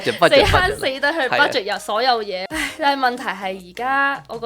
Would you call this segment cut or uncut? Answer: cut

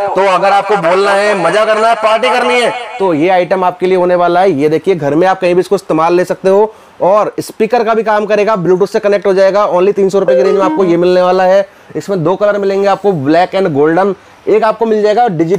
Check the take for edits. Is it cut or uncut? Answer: uncut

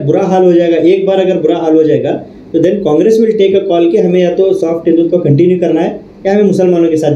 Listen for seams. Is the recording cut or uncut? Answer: uncut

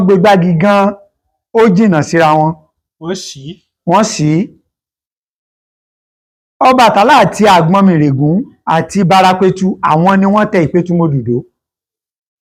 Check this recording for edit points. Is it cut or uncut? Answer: uncut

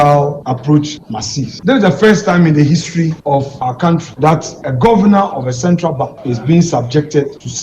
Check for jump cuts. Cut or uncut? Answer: cut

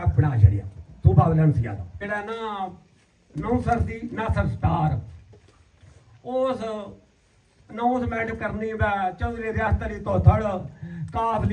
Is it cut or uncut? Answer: cut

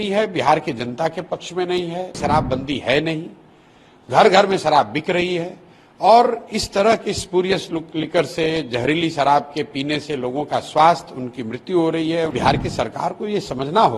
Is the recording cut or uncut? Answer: cut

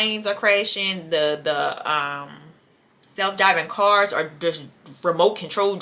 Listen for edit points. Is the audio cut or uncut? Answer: uncut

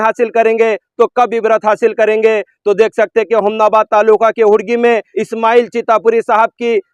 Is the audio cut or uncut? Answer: uncut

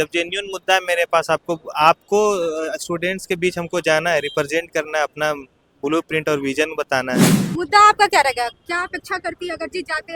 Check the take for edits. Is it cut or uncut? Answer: cut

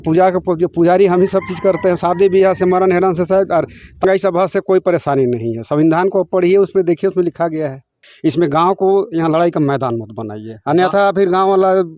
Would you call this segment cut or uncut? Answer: cut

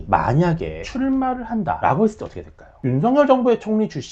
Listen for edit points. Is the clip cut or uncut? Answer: cut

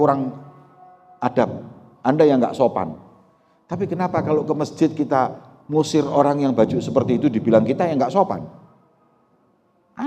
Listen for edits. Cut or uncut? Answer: uncut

